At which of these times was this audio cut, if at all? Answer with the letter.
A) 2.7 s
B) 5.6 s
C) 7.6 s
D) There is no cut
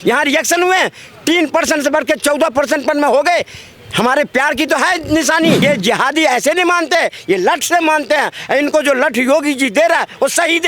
B